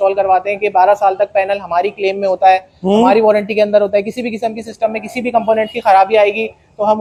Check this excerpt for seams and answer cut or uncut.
uncut